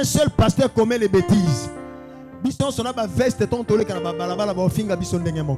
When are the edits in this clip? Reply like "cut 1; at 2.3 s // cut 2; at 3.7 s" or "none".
none